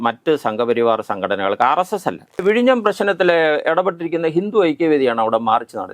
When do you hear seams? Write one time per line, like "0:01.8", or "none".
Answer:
0:02.4